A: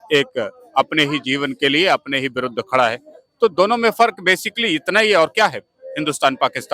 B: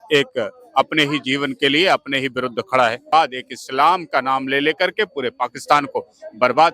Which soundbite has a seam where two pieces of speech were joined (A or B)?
B